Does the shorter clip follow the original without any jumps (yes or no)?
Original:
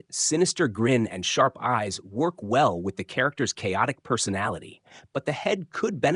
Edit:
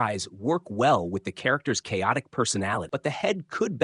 no